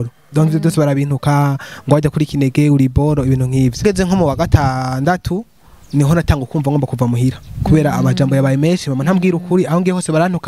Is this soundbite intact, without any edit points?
no; 1 cut; at 3.8 s

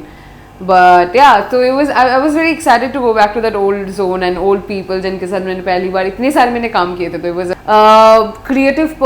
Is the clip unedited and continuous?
no; 1 cut; at 7.5 s

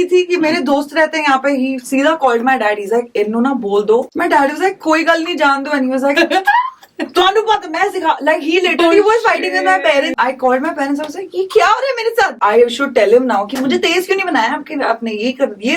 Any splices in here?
yes; 3 cuts; at 4.1 s, 10.1 s, 12.4 s

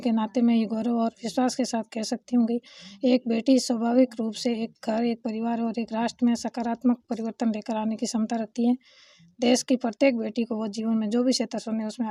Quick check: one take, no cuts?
yes; 0 cuts

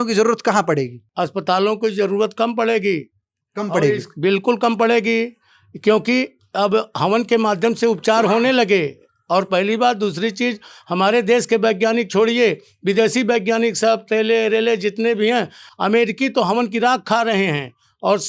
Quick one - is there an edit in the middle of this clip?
no; 0 cuts

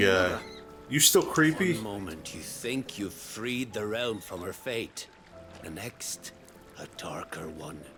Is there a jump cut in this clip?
no; 0 cuts

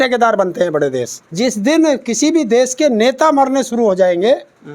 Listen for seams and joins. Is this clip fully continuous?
no; 1 cut; at 1.2 s

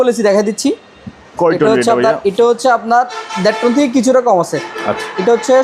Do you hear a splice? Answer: no; 0 cuts

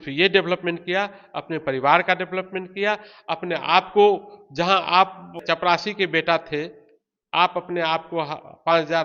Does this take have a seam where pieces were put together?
no; 0 cuts

